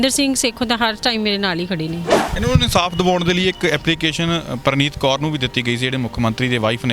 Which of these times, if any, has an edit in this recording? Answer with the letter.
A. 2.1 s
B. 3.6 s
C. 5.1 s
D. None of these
A